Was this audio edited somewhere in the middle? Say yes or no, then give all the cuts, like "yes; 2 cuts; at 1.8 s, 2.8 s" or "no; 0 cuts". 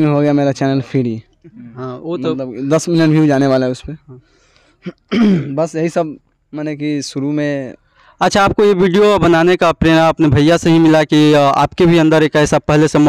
no; 0 cuts